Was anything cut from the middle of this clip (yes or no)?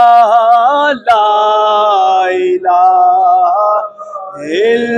no